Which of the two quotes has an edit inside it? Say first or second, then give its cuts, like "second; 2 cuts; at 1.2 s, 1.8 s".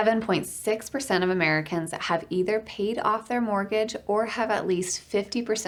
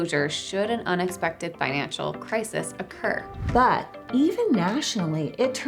second; 1 cut; at 3.3 s